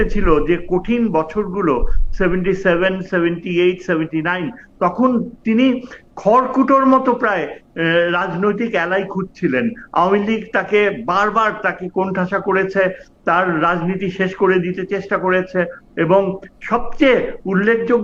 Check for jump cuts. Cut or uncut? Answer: uncut